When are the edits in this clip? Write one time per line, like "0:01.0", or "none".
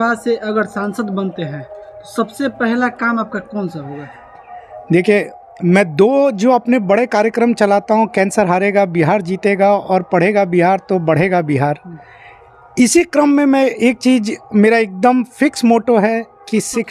none